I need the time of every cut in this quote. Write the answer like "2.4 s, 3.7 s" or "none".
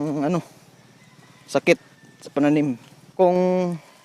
3.2 s